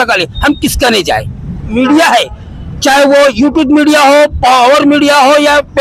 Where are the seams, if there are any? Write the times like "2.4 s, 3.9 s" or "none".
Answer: 1.7 s